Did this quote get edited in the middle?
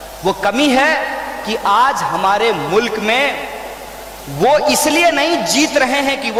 no; 0 cuts

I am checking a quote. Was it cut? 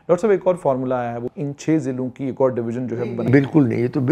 yes; 1 cut; at 1.2 s

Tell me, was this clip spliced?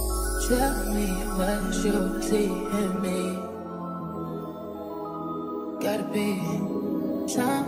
no; 0 cuts

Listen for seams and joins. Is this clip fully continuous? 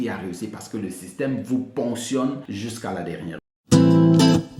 no; 2 cuts; at 2.4 s, 3.4 s

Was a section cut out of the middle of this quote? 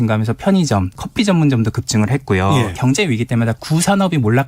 yes; 2 cuts; at 0.9 s, 2.7 s

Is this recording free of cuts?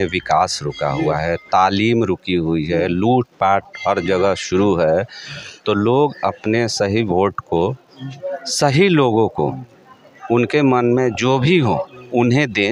yes; 0 cuts

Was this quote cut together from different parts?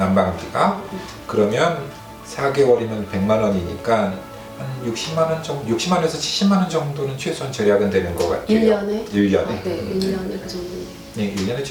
no; 0 cuts

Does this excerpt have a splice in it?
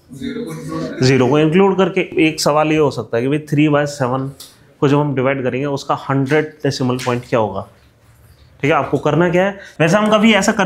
yes; 2 cuts; at 2.1 s, 9.7 s

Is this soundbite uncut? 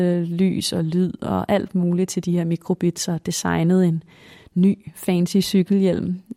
yes; 0 cuts

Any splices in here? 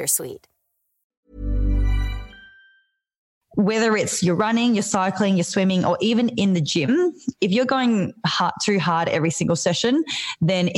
yes; 1 cut; at 3.4 s

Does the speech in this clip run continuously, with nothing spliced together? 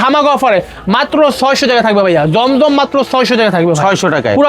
yes; 0 cuts

